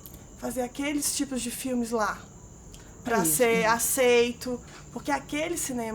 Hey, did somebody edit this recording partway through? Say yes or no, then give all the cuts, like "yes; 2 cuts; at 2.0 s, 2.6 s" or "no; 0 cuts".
yes; 1 cut; at 4.7 s